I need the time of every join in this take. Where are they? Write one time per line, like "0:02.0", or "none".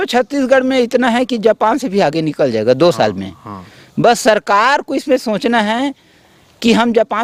none